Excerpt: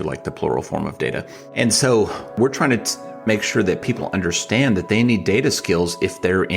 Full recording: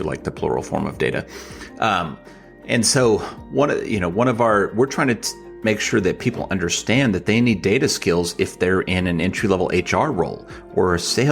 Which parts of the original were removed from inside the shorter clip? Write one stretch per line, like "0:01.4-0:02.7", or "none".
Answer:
0:01.4-0:02.5
0:03.4-0:04.7

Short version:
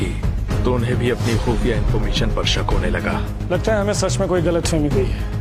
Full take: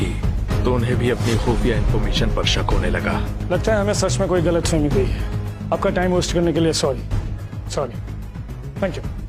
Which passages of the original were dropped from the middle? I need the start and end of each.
none

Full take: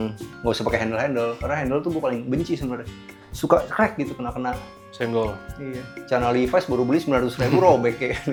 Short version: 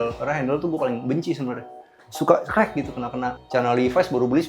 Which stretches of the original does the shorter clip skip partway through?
0:04.6-0:06.0

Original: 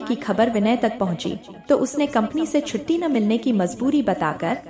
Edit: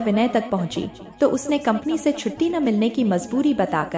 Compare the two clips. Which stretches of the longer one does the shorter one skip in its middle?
none

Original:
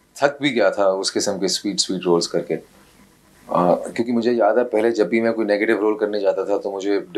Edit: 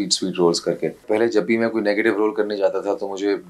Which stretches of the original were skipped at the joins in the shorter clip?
0:02.7-0:04.7

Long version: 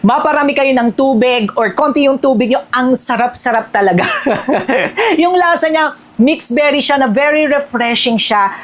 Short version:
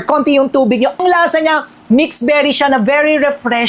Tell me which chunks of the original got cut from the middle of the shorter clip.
0:02.7-0:05.3

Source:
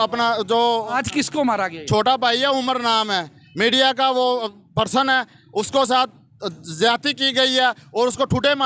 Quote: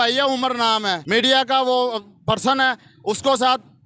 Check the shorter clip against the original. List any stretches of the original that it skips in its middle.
0:03.2-0:03.5

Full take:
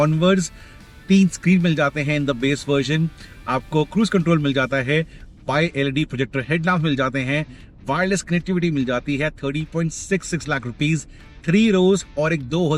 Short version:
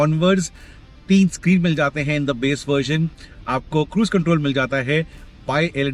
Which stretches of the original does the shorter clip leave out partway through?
none

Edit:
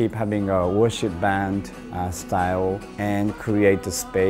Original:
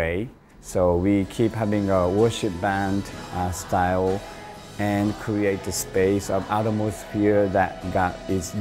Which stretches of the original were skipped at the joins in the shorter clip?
0:04.3-0:04.7

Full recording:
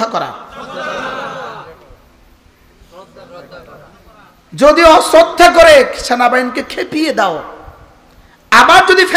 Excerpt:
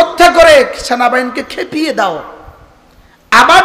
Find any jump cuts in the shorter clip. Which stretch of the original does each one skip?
none

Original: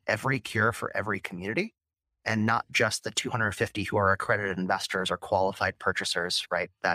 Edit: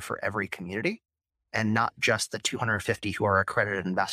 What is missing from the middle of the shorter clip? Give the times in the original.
none

